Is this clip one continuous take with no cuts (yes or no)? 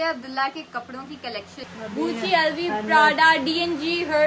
no